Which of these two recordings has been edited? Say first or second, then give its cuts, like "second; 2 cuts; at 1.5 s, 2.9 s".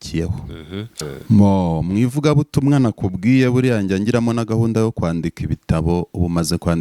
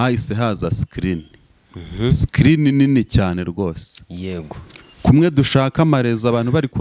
first; 1 cut; at 1.0 s